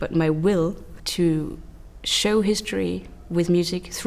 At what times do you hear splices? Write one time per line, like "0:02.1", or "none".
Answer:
0:01.0